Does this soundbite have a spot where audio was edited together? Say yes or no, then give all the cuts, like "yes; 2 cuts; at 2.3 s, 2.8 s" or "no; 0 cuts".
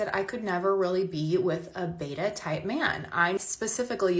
no; 0 cuts